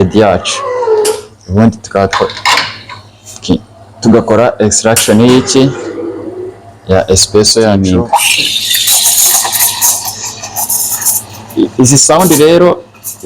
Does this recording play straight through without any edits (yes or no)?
no